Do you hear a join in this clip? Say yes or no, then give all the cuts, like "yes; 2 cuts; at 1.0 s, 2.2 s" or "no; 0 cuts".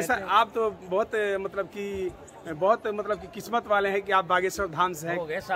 no; 0 cuts